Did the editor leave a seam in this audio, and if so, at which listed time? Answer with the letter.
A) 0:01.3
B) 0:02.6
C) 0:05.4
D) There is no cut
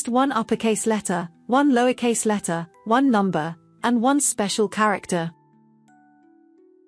C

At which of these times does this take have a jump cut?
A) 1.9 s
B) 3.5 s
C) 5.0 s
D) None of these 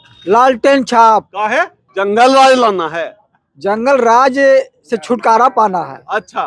A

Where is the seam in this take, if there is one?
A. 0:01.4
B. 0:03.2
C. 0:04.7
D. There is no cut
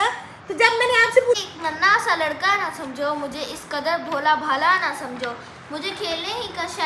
A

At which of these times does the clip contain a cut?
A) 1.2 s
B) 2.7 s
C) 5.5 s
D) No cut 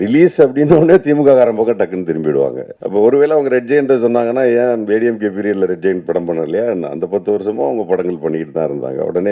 B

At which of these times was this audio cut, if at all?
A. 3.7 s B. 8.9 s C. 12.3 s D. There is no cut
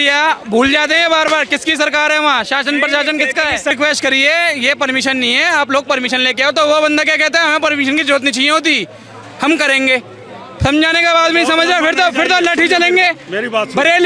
A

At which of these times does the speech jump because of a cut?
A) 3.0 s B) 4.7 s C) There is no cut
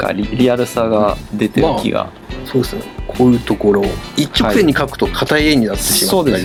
C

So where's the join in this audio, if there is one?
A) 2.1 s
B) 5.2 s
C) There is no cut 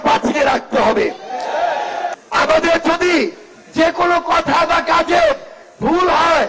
A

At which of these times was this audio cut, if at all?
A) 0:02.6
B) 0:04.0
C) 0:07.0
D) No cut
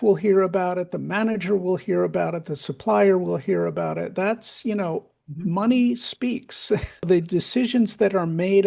C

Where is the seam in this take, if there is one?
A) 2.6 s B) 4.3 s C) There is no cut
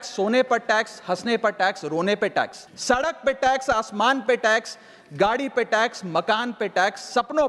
A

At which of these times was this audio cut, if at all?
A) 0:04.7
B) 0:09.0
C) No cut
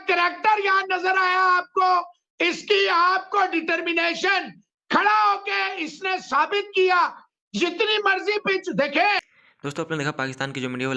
C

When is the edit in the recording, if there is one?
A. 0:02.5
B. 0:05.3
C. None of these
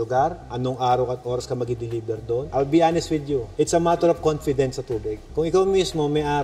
A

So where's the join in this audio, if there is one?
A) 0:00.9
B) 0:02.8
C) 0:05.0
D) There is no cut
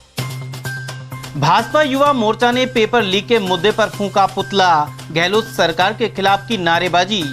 A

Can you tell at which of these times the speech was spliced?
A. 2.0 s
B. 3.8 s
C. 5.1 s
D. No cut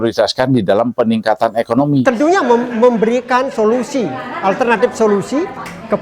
A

